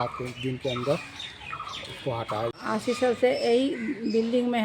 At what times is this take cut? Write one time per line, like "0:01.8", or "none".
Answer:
0:02.5